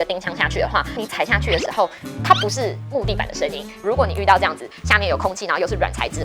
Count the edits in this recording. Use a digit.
1